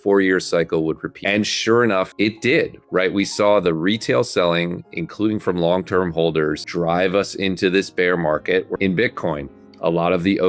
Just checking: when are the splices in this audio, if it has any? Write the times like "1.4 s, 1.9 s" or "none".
1.1 s, 2.1 s, 6.6 s, 8.7 s